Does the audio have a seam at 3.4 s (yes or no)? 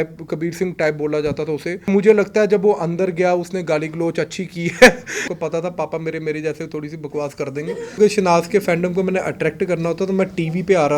no